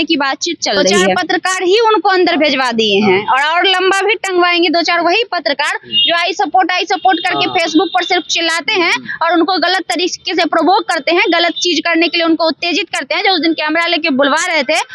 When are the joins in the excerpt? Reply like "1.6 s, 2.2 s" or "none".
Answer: 1.2 s